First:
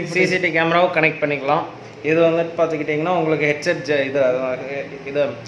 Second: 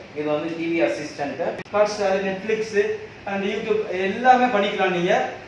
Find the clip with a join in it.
second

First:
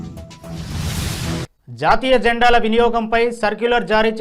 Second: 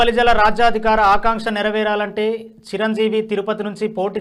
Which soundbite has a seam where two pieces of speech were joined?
first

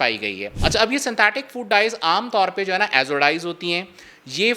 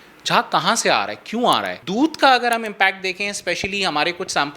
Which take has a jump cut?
second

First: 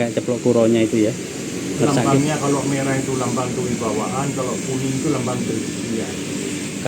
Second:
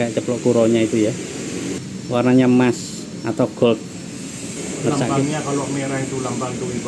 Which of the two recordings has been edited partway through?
first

